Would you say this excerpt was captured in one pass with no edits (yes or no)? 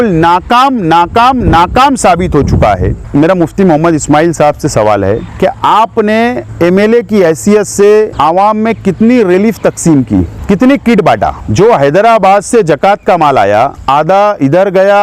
no